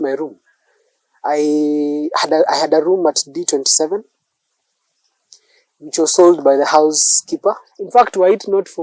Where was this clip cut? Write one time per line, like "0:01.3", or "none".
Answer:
0:07.7